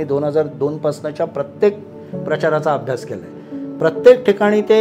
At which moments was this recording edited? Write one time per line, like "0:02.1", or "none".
none